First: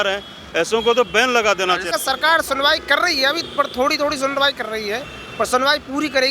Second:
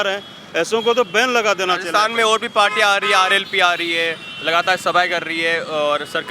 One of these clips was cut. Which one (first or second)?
first